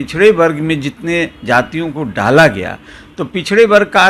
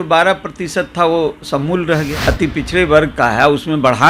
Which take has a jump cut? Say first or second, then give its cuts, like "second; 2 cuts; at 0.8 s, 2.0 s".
second; 1 cut; at 2.1 s